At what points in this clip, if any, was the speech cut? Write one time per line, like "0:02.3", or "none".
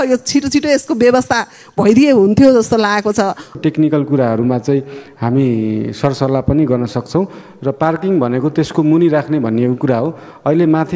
0:03.6